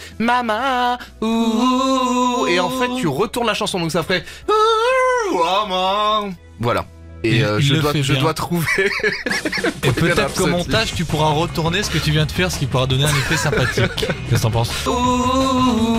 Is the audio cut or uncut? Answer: uncut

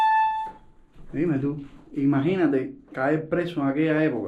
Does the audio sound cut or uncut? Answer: uncut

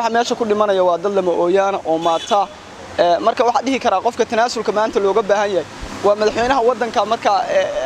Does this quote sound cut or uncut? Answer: uncut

